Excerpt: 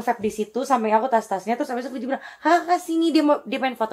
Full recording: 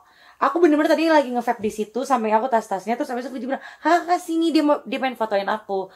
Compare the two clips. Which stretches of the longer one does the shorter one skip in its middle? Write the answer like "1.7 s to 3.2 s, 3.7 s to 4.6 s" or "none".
none